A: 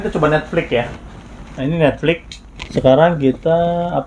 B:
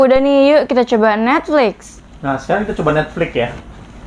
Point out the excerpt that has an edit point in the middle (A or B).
A